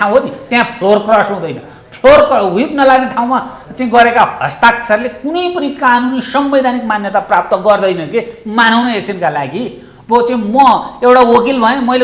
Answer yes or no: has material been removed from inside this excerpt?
no